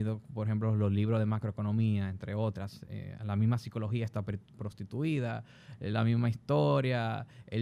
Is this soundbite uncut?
yes; 0 cuts

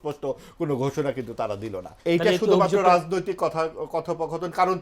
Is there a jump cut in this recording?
yes; 1 cut; at 1.9 s

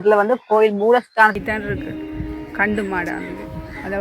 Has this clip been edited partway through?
yes; 1 cut; at 1.3 s

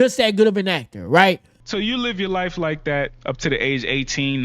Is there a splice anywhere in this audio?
yes; 1 cut; at 1.6 s

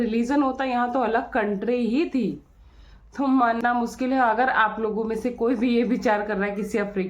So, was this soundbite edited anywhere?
yes; 1 cut; at 3.6 s

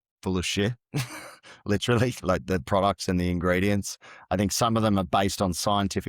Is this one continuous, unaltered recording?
yes; 0 cuts

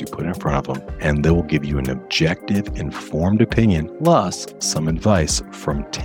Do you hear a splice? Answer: yes; 2 cuts; at 0.9 s, 3.9 s

